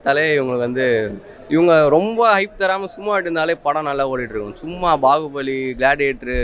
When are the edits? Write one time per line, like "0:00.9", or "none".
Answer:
none